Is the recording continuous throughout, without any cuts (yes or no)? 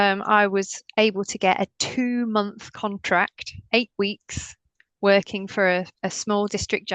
yes